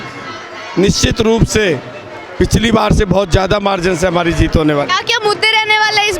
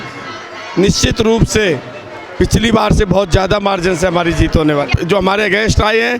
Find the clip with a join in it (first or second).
second